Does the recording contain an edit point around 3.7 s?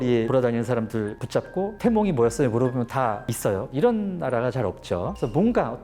yes; 1 cut; at 3.7 s

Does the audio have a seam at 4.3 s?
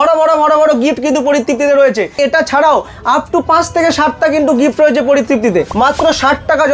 no; 2 cuts; at 2.1 s, 5.7 s

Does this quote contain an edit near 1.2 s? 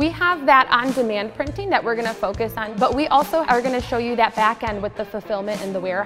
no; 2 cuts; at 2.6 s, 3.5 s

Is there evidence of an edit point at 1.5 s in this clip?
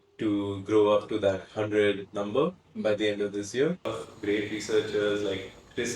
no; 1 cut; at 3.9 s

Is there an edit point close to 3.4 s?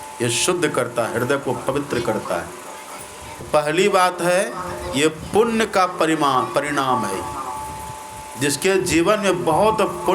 yes; 1 cut; at 3.4 s

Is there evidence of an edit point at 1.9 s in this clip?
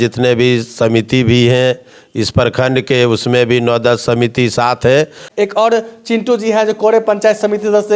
no; 1 cut; at 5.2 s

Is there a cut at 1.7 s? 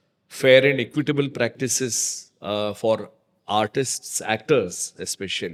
no; 0 cuts

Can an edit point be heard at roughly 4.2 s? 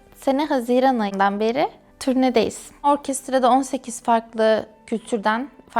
no; 2 cuts; at 1.9 s, 2.9 s

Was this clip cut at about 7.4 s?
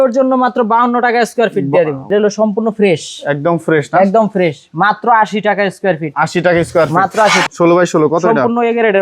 yes; 2 cuts; at 2.0 s, 7.4 s

